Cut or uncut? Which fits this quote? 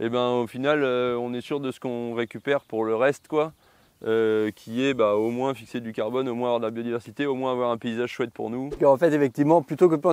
cut